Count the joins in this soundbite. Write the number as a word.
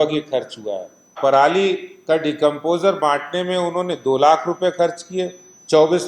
one